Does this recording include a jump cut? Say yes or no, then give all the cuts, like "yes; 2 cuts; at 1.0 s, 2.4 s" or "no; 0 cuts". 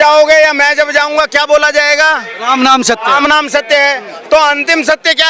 no; 0 cuts